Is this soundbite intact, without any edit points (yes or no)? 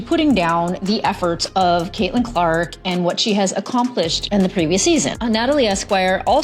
no